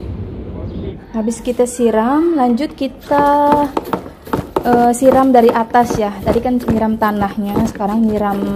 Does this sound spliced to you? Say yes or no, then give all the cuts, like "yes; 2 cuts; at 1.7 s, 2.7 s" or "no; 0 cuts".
yes; 1 cut; at 1.0 s